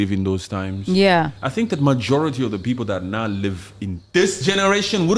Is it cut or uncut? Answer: uncut